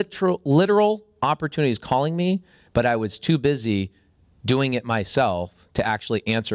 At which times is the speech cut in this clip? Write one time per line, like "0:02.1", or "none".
none